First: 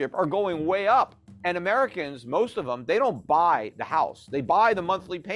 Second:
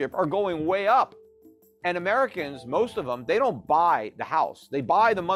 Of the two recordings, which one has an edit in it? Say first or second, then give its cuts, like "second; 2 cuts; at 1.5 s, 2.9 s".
first; 1 cut; at 1.3 s